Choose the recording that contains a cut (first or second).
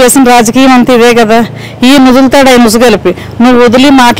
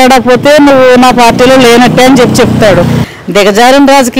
second